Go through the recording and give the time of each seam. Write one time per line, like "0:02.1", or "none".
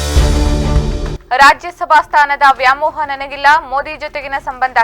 0:01.0